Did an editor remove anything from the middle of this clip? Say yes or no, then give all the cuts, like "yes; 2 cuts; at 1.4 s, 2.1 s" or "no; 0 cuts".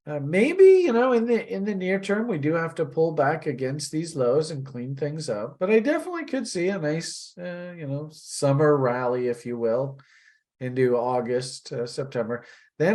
no; 0 cuts